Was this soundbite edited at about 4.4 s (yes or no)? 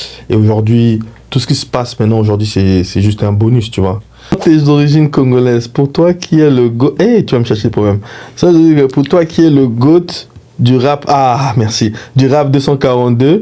yes